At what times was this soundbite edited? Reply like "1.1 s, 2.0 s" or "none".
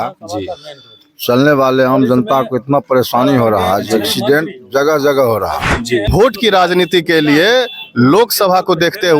6.1 s